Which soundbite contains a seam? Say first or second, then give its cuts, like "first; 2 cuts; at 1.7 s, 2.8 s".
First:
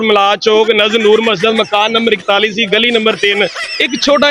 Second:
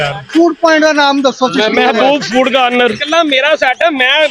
second; 1 cut; at 3.0 s